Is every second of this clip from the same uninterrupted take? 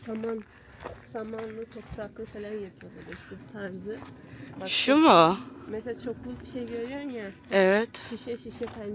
no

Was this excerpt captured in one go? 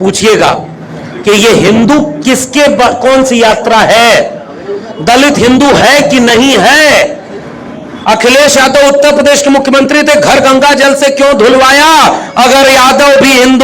yes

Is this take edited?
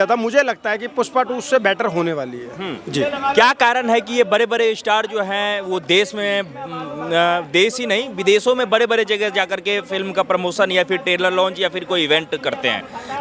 no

